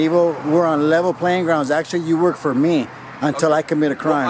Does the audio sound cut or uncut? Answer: uncut